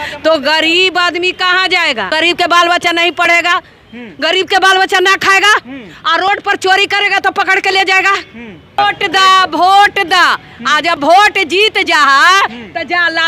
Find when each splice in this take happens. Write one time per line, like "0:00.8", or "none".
0:02.1
0:08.8